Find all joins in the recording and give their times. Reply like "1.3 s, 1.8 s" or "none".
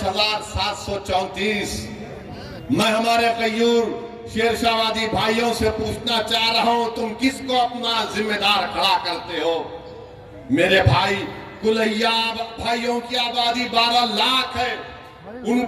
none

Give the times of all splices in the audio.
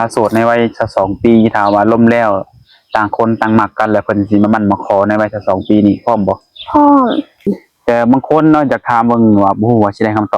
7.6 s

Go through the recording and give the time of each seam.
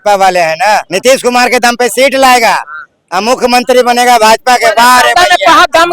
0.9 s

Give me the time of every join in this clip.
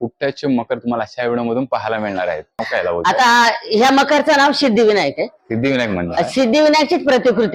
2.6 s

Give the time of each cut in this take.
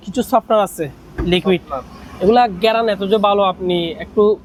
none

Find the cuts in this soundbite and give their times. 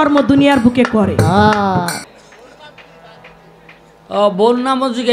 2.0 s

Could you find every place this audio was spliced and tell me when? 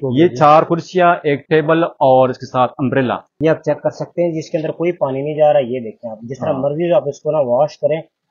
3.3 s

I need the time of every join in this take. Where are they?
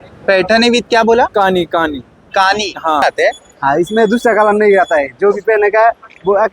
3.0 s

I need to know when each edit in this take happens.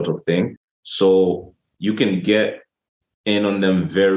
none

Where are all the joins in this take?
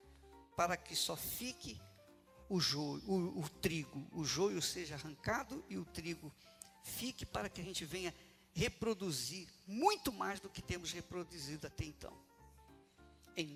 none

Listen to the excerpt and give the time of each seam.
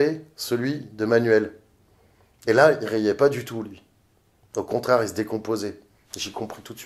none

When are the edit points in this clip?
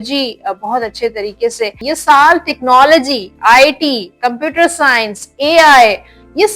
1.8 s

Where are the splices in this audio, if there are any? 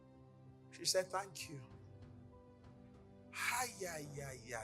1.9 s, 3.4 s

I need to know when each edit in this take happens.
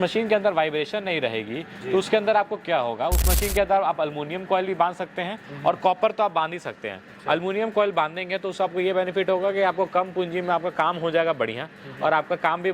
none

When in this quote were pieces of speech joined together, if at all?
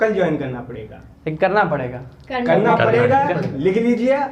none

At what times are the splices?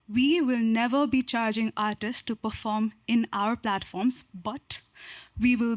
none

